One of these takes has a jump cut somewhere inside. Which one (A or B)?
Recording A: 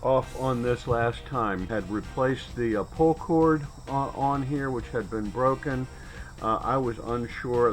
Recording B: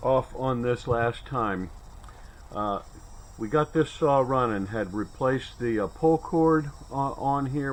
A